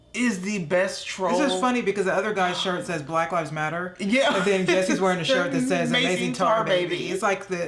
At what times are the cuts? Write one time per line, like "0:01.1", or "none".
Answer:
none